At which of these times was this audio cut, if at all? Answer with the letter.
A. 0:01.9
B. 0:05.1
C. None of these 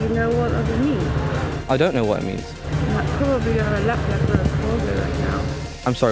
C